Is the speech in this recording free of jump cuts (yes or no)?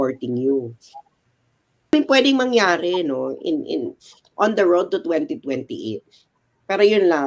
no